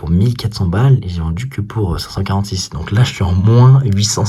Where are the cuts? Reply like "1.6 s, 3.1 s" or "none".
none